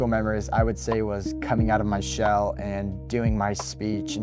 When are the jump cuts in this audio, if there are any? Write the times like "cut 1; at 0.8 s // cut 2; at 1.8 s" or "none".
none